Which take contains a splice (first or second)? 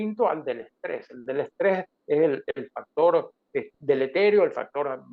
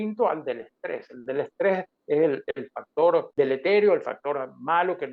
second